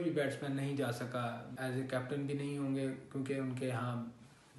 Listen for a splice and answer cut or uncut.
cut